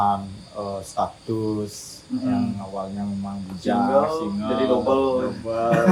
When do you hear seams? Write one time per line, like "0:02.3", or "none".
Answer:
none